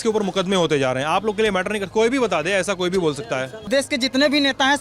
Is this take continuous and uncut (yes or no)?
no